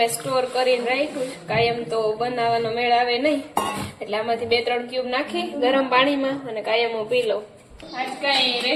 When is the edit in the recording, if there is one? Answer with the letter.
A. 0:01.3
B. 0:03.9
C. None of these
C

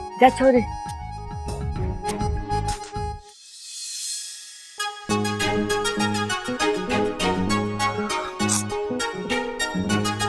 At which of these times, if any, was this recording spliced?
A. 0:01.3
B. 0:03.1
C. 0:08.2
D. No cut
B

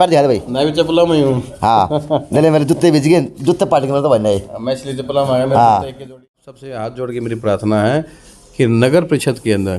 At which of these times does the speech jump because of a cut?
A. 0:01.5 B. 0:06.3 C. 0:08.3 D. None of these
B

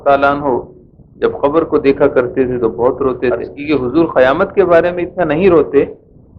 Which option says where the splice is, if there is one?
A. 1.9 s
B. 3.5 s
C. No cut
B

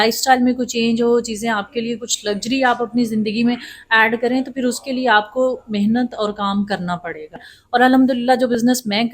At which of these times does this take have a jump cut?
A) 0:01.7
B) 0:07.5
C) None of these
B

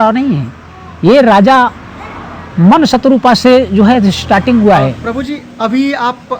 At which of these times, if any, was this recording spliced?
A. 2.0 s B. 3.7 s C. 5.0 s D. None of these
C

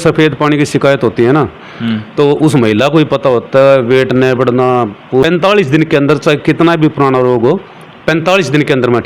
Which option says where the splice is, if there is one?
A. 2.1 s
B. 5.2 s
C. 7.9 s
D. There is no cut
B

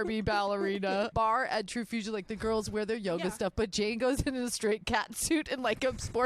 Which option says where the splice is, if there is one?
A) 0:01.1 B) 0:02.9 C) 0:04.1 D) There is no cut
A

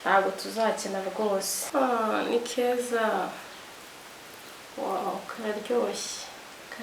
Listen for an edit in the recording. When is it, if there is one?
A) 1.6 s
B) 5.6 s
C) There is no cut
A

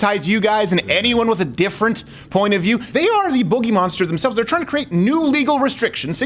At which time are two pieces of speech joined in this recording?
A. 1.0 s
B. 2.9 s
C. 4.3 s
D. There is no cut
B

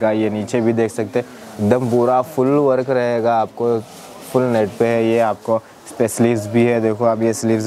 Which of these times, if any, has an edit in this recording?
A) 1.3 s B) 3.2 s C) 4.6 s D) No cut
D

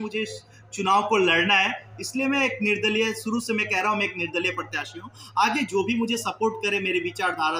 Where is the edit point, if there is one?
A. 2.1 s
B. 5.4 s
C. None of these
C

